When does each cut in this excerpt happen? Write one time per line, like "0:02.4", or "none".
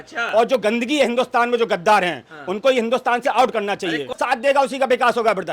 0:04.1